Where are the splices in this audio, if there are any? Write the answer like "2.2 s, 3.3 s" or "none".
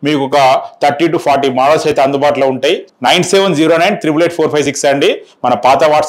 2.9 s